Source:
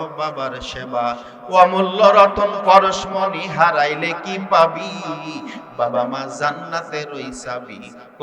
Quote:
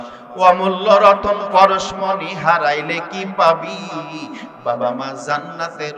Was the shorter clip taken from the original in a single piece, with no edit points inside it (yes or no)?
yes